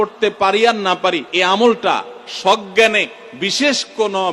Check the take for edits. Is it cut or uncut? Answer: cut